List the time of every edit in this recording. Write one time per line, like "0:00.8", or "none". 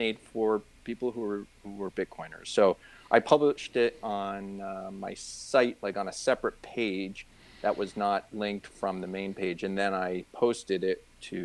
none